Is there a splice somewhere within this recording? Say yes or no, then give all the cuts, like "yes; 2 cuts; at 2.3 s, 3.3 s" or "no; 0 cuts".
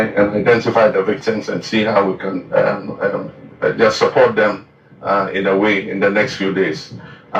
yes; 1 cut; at 2.4 s